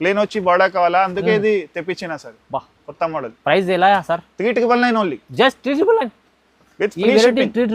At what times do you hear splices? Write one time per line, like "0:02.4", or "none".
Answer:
none